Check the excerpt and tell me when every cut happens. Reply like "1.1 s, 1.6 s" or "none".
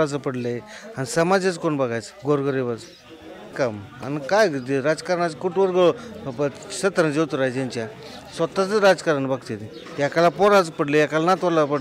3.5 s